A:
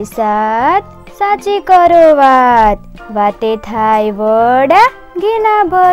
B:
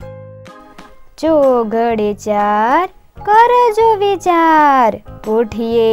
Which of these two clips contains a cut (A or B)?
B